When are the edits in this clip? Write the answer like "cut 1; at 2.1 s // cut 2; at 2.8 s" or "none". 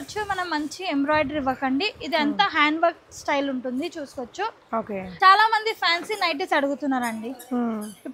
cut 1; at 5.0 s